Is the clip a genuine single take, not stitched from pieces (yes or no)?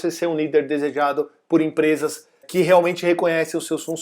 no